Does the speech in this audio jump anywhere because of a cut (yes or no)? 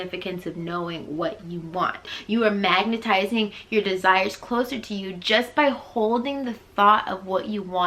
yes